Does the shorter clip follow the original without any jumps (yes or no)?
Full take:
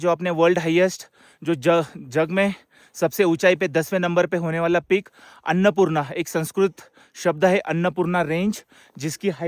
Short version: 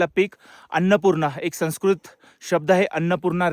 yes